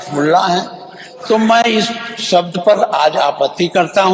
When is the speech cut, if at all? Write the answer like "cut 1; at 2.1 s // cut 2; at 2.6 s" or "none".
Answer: none